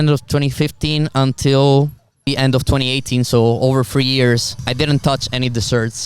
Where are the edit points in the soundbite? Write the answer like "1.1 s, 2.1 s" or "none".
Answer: 2.3 s, 4.6 s